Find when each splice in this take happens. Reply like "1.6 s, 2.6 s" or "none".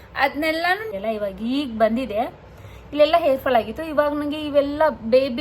0.9 s